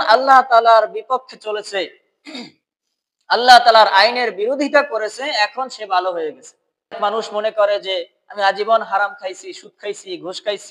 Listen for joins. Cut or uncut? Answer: cut